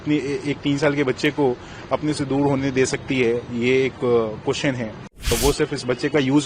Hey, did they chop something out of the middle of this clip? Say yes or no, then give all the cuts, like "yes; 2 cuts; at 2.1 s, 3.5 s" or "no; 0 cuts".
yes; 1 cut; at 5.3 s